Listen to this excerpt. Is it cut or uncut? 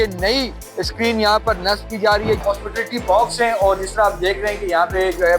cut